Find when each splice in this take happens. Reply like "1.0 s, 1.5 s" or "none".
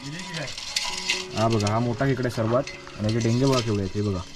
none